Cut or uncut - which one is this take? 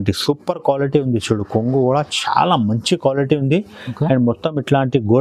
uncut